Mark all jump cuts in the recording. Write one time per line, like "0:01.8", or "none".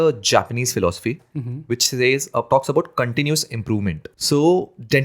0:04.1